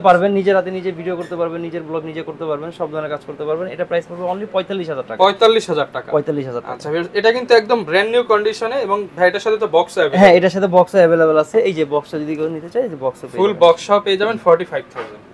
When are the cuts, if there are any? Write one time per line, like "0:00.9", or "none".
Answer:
none